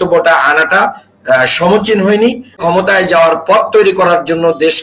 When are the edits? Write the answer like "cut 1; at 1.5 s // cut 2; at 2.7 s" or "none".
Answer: cut 1; at 2.6 s